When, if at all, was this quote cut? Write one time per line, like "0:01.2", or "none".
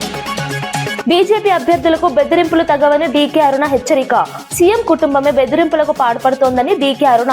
0:01.0